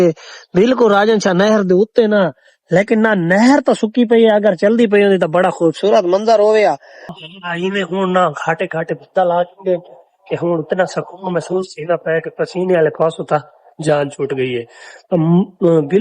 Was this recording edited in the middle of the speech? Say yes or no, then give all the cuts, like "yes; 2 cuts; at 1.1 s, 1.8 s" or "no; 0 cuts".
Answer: yes; 1 cut; at 7.2 s